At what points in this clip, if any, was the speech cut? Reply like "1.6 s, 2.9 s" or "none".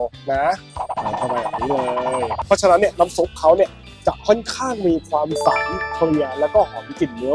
2.3 s